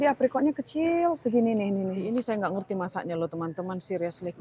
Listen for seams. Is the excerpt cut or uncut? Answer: cut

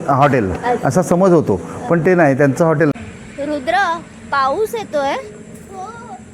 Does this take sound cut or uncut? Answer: cut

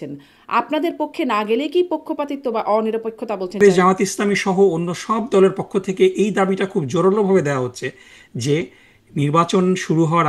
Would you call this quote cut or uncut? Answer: cut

